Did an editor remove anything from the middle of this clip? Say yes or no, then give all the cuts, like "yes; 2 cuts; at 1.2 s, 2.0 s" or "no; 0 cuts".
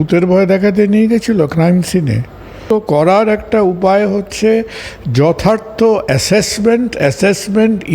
yes; 1 cut; at 2.6 s